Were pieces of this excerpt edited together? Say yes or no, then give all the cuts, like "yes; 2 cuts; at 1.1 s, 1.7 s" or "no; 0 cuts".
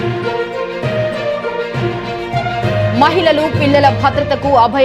yes; 1 cut; at 1.3 s